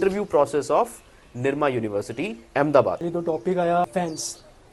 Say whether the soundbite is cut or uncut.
cut